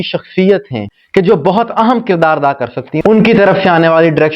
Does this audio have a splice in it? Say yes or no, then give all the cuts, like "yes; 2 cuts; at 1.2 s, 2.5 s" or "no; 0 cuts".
yes; 1 cut; at 2.9 s